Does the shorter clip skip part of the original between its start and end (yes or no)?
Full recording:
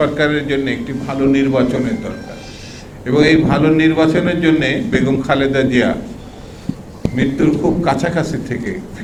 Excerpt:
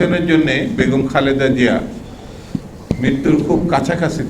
no